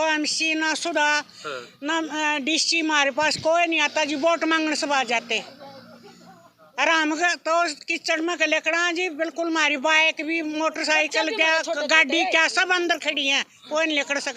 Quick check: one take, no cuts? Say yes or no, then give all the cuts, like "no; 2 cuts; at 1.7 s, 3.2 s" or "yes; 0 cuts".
yes; 0 cuts